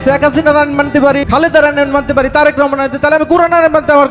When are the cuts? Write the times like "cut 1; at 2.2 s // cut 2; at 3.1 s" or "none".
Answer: cut 1; at 1.2 s